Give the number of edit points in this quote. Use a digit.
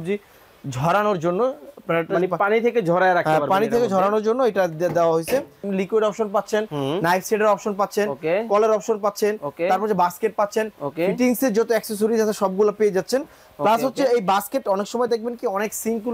1